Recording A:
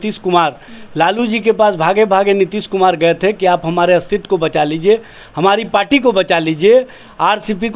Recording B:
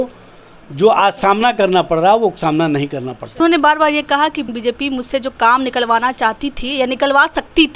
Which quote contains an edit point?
B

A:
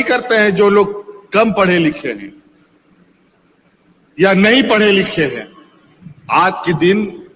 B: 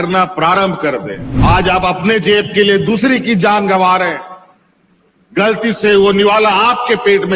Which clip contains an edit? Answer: B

